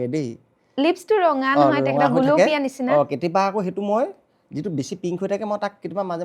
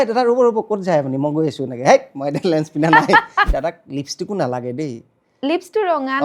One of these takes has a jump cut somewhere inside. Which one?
second; 1 cut; at 3.5 s

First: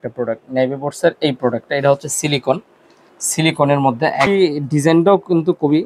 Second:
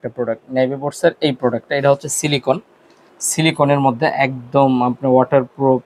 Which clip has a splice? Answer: first; 1 cut; at 4.3 s

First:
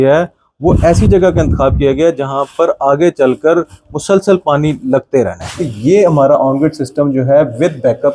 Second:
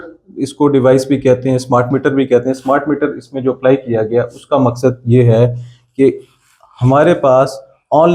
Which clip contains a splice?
first; 1 cut; at 5.7 s

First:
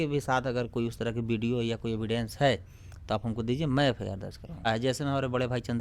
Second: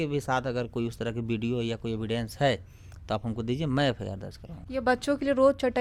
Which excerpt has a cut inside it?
first; 1 cut; at 4.7 s

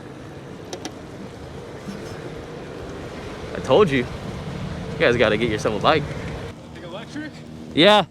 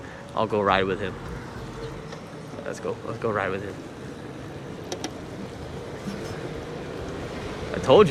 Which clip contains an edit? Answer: first; 1 cut; at 6.5 s

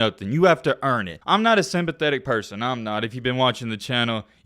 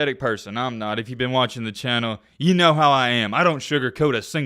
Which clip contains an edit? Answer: first; 1 cut; at 1.1 s

